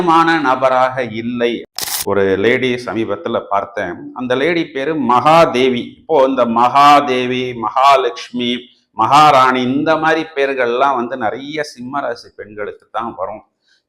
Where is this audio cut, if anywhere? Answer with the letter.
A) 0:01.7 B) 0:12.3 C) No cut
A